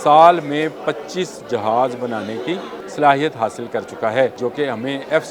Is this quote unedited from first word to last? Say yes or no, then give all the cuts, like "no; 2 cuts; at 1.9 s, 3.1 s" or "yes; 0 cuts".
no; 2 cuts; at 2.8 s, 4.4 s